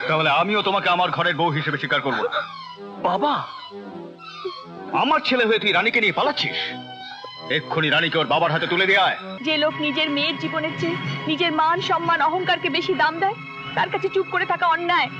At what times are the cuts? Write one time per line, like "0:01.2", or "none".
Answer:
0:09.3